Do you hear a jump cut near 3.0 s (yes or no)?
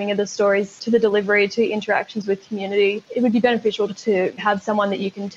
yes